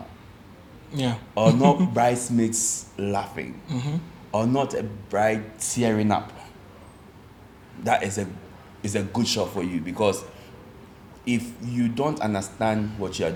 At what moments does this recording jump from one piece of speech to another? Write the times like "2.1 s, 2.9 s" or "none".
none